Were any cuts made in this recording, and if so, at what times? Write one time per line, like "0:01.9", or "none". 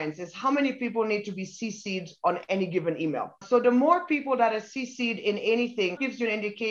none